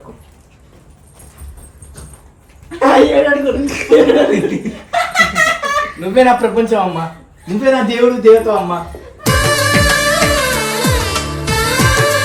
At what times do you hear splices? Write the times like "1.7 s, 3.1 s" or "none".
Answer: none